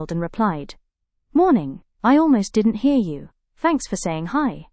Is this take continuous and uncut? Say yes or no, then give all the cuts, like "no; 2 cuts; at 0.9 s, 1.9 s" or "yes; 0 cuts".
yes; 0 cuts